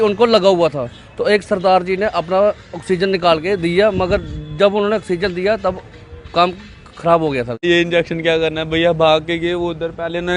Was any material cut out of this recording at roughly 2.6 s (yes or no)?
no